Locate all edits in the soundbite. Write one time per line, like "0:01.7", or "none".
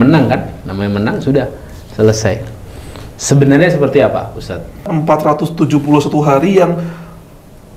0:04.9